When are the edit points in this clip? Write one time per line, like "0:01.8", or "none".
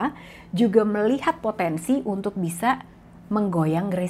none